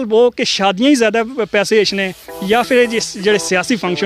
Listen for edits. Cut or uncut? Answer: uncut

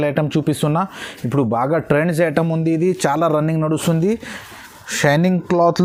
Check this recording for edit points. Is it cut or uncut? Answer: uncut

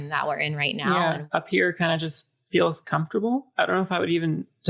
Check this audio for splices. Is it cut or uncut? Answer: cut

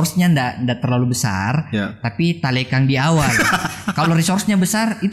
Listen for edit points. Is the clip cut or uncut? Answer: uncut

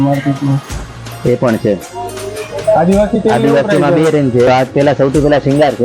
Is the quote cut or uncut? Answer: cut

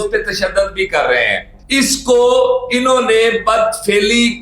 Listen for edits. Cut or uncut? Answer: cut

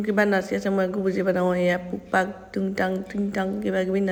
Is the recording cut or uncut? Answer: uncut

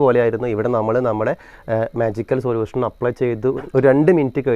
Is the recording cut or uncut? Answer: uncut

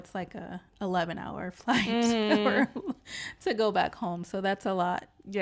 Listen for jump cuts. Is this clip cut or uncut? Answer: uncut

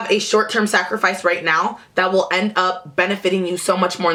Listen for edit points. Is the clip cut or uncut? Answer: uncut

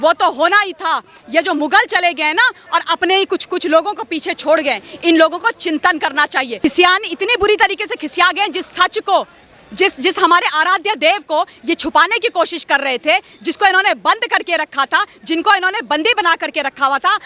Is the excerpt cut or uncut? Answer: cut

